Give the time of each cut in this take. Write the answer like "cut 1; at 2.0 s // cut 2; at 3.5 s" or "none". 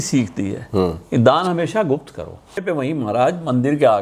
cut 1; at 2.6 s